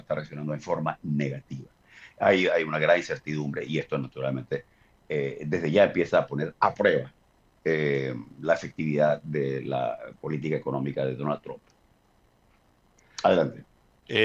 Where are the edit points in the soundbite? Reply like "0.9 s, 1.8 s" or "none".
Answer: none